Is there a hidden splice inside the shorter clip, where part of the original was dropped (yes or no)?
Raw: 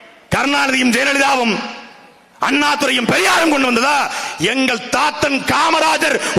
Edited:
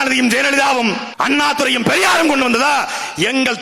yes